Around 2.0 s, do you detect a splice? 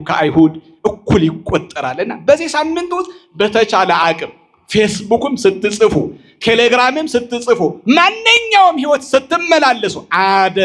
no; 0 cuts

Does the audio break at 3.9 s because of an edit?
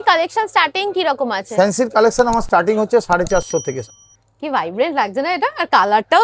yes; 1 cut; at 3.9 s

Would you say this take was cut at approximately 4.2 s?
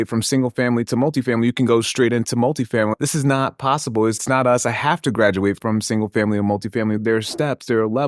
yes; 4 cuts; at 2.9 s, 4.2 s, 5.6 s, 7.0 s

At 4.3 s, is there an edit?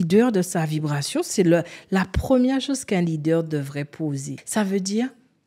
yes; 1 cut; at 4.3 s

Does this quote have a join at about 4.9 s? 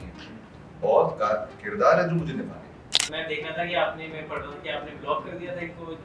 no; 1 cut; at 3.1 s

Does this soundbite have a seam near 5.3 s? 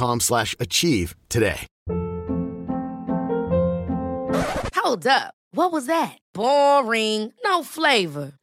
no; 1 cut; at 1.7 s

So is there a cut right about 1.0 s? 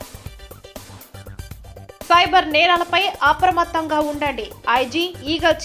no; 0 cuts

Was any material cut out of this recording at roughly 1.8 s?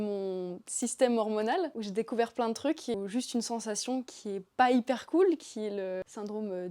no; 0 cuts

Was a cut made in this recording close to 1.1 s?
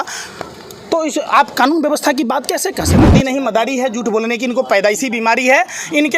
no; 1 cut; at 3.0 s

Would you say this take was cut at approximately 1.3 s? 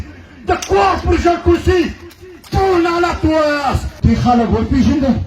no; 1 cut; at 3.9 s

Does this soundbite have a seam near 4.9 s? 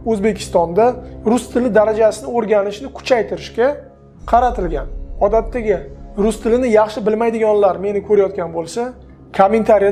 no; 0 cuts

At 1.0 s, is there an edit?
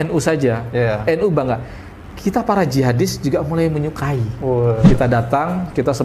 no; 1 cut; at 4.8 s

